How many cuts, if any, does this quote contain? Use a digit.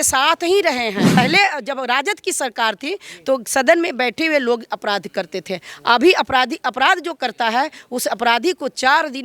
1